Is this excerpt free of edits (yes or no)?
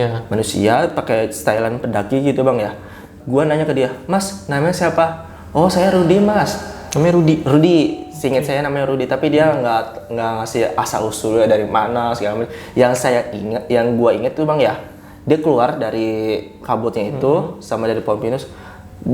no